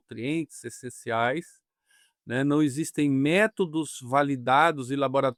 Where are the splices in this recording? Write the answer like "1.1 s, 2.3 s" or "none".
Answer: none